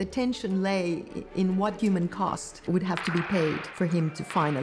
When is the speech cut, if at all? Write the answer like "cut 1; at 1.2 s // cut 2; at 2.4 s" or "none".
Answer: cut 1; at 1.8 s // cut 2; at 3.7 s